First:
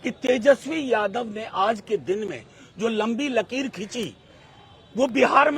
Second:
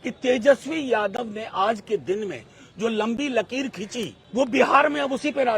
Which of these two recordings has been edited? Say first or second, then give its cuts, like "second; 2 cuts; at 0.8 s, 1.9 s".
second; 1 cut; at 4.2 s